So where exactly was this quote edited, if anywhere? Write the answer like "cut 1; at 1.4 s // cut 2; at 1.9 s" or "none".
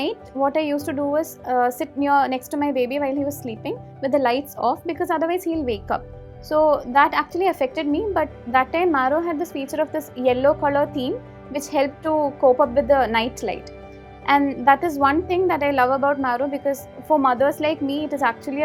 none